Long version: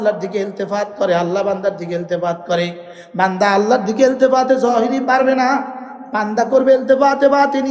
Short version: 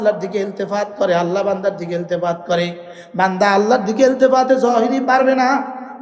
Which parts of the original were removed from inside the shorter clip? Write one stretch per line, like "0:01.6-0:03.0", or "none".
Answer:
none